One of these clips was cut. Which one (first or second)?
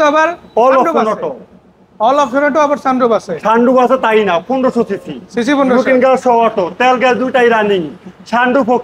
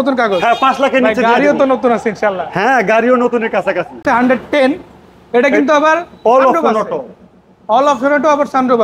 second